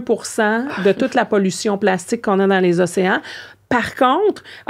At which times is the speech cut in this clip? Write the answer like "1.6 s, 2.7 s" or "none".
none